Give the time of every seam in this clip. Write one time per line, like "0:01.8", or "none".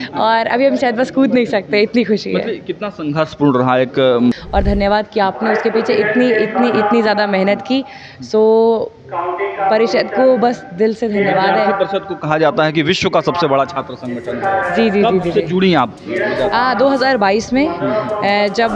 0:04.4